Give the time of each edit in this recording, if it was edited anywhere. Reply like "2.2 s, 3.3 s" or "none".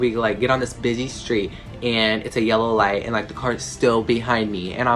none